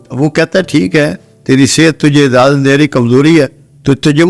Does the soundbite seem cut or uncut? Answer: uncut